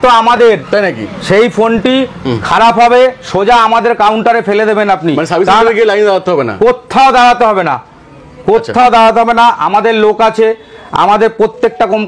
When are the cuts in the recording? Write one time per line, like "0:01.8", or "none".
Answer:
none